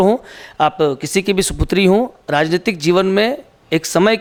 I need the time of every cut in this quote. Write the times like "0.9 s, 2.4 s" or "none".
none